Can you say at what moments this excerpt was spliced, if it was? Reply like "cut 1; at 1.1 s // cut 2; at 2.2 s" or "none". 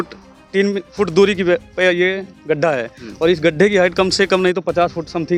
none